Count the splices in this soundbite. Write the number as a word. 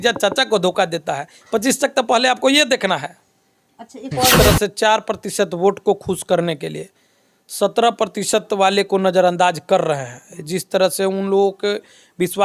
one